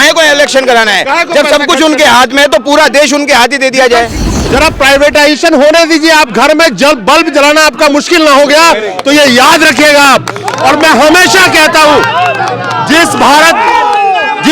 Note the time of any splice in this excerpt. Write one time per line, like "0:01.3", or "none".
0:04.3

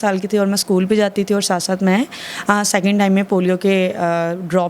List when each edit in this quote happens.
none

